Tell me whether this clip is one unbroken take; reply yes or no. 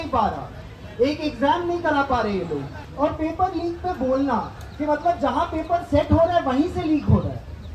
no